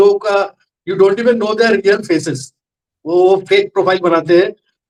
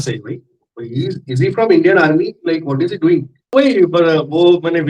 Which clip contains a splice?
second; 1 cut; at 3.4 s

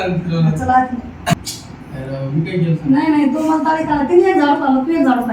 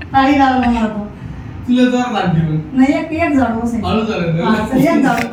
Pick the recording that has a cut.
first; 1 cut; at 1.4 s

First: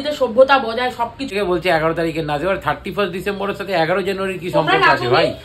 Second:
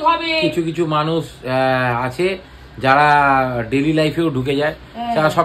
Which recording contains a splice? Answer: first; 1 cut; at 1.3 s

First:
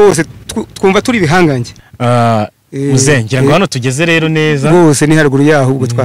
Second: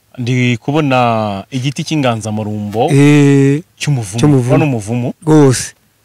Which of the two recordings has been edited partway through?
first; 1 cut; at 1.8 s

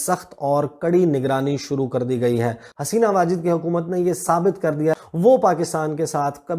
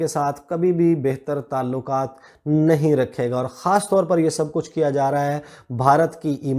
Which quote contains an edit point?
first; 2 cuts; at 2.7 s, 5.0 s

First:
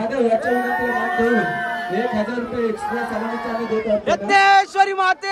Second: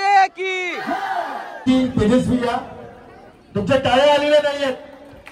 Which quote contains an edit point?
second; 1 cut; at 1.6 s

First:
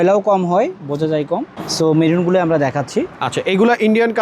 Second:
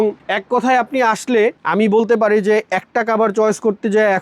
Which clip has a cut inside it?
first; 1 cut; at 1.5 s

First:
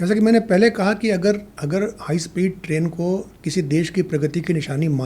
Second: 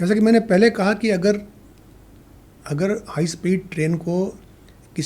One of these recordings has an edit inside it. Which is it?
first; 2 cuts; at 1.5 s, 3.4 s

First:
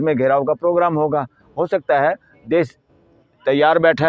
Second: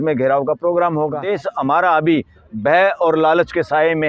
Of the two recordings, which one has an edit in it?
second; 1 cut; at 1.3 s

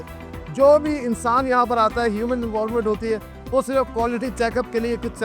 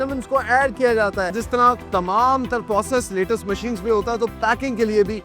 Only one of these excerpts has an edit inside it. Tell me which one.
second; 1 cut; at 1.4 s

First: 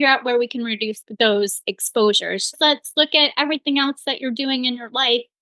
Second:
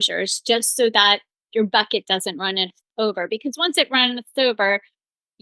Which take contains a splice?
first; 2 cuts; at 1.0 s, 2.5 s

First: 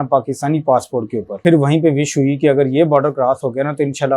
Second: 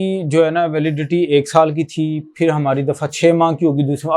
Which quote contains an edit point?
first; 1 cut; at 1.4 s

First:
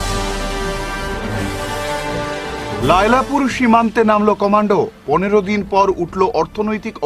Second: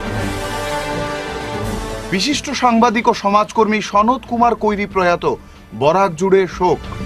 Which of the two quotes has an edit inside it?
second; 1 cut; at 1.2 s

